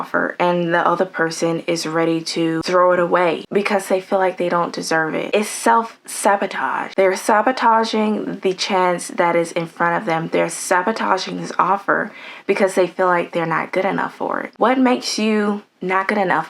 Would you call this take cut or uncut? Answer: uncut